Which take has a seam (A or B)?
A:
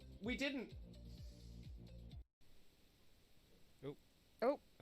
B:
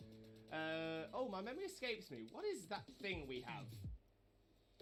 A